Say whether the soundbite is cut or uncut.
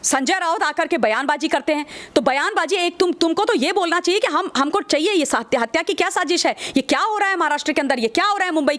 uncut